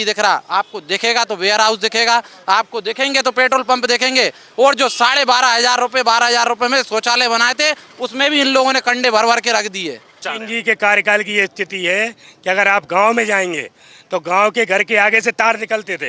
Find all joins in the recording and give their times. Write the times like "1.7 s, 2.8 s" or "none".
10.2 s